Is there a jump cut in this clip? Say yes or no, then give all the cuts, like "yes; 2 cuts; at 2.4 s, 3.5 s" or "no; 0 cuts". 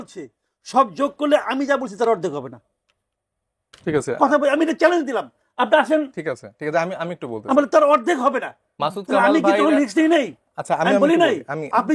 no; 0 cuts